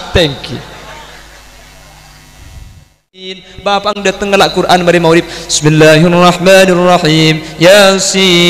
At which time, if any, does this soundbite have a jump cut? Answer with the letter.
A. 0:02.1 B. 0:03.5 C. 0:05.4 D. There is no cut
B